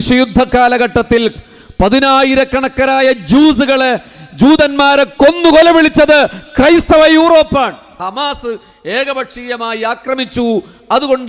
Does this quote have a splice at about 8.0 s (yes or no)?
yes